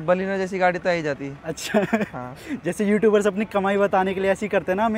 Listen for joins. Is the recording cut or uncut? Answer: uncut